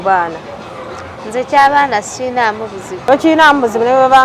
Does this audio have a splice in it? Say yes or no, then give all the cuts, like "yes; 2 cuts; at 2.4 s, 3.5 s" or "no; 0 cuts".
yes; 1 cut; at 2.9 s